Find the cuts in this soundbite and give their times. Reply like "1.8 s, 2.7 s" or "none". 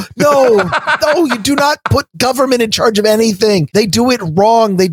3.7 s